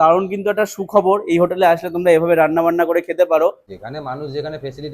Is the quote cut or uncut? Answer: cut